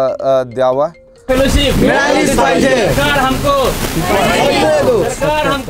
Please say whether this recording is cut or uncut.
cut